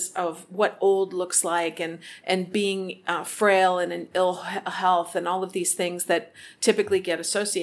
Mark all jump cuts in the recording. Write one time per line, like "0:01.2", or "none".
none